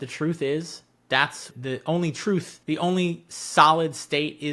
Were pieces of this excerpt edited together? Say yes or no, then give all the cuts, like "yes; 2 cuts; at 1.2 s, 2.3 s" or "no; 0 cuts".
yes; 1 cut; at 2.5 s